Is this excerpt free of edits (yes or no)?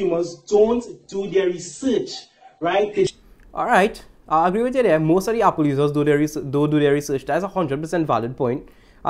yes